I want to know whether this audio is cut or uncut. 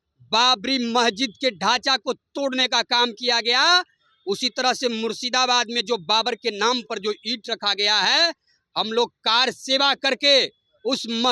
uncut